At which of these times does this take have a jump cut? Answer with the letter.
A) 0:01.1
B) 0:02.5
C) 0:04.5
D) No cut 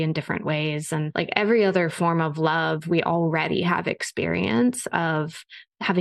A